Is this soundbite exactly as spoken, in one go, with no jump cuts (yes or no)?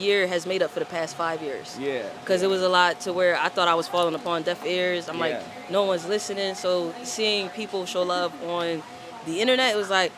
yes